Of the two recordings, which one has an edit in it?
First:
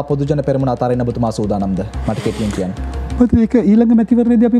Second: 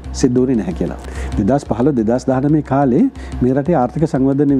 second; 1 cut; at 1.0 s

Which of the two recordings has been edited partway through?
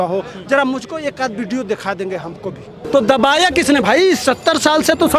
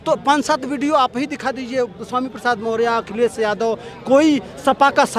first; 1 cut; at 2.7 s

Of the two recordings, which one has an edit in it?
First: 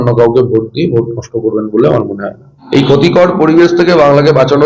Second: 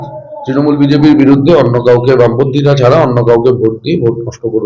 first; 1 cut; at 2.5 s

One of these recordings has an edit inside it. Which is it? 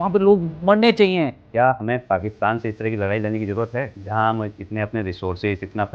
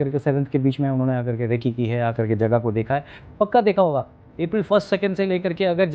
first; 2 cuts; at 1.4 s, 4.0 s

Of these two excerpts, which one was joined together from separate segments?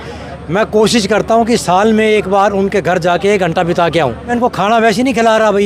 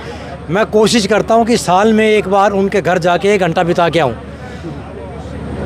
first; 1 cut; at 4.3 s

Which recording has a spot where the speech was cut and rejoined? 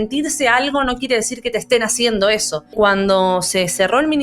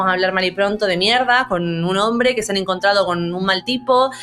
first; 1 cut; at 2.7 s

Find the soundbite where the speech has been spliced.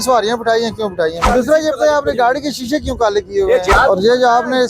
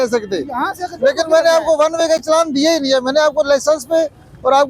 first; 2 cuts; at 1.3 s, 3.7 s

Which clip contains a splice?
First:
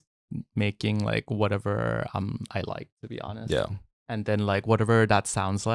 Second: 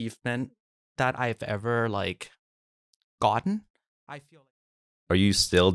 second; 1 cut; at 4.7 s

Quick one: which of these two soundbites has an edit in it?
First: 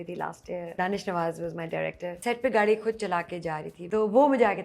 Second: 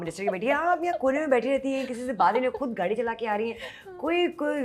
first; 3 cuts; at 0.8 s, 2.2 s, 3.7 s

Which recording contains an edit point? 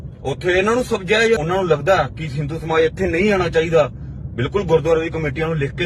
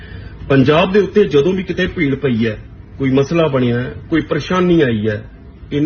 first; 1 cut; at 1.4 s

